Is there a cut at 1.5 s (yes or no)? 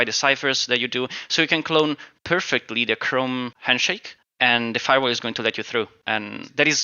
no